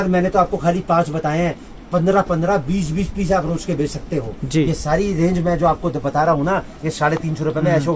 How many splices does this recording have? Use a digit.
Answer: 0